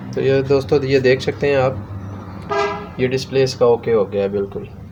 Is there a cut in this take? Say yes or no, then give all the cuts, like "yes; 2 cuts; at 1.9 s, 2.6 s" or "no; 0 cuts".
no; 0 cuts